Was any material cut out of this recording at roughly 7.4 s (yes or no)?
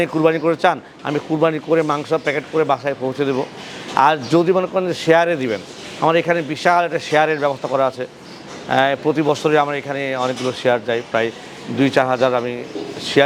no